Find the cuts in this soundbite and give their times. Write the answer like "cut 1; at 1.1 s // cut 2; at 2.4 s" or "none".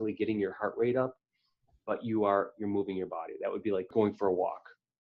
cut 1; at 3.9 s